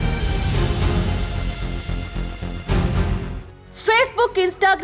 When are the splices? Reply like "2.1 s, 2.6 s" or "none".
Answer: 3.6 s